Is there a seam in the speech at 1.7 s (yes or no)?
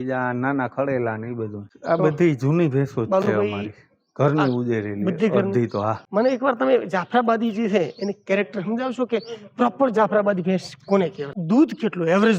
yes